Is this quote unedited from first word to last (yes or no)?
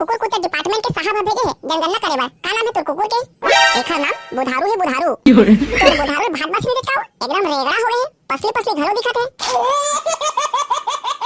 yes